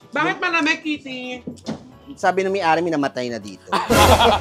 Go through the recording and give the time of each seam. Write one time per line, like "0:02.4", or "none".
none

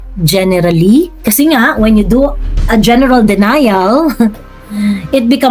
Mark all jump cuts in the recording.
0:01.2

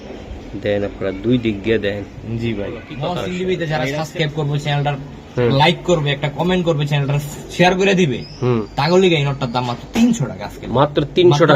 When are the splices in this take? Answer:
0:02.9

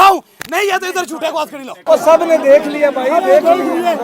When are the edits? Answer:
0:01.8

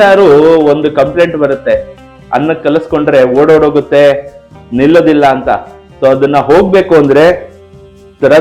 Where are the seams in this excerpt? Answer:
none

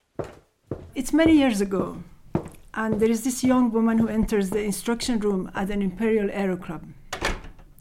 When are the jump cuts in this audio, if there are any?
0:00.9

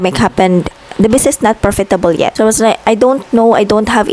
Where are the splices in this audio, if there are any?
0:02.3

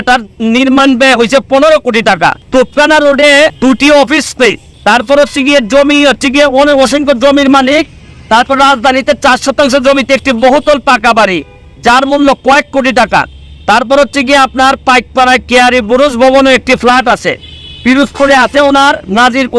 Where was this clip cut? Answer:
0:02.4
0:03.6
0:04.7

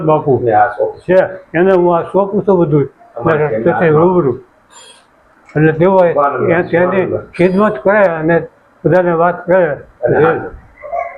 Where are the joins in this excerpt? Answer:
none

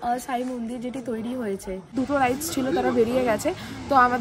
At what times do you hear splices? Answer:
0:01.9

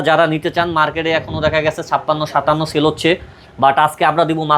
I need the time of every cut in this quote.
none

